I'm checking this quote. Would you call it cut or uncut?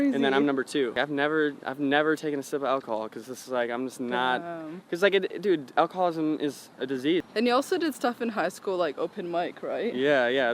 cut